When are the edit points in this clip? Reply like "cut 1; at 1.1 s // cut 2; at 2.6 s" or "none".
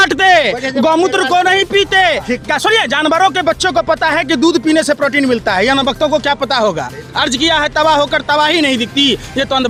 none